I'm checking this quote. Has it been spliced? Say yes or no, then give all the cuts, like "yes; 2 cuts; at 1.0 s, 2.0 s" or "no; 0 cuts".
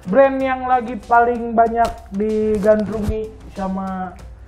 no; 0 cuts